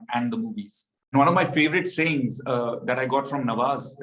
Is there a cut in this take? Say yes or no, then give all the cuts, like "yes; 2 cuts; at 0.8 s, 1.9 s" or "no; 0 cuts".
yes; 1 cut; at 1.1 s